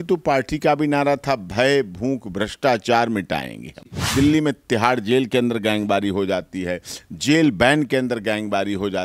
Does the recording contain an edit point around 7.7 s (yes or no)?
no